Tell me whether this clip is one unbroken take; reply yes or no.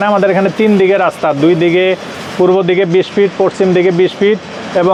yes